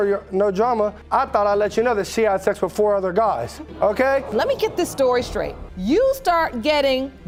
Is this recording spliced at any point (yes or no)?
no